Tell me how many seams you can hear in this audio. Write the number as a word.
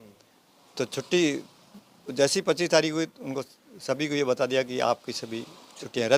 zero